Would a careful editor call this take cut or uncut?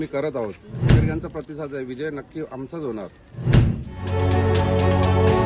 cut